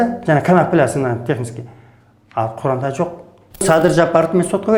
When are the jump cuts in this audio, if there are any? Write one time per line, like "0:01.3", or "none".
0:03.6

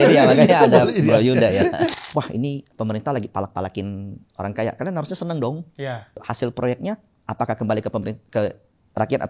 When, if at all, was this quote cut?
0:01.9
0:06.2

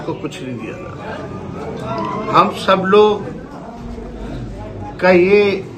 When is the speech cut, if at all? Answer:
none

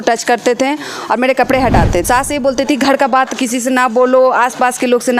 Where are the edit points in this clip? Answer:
0:02.0

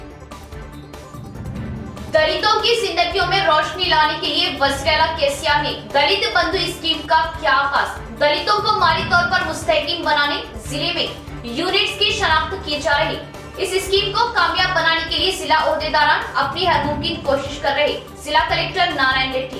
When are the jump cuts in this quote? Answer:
0:01.8

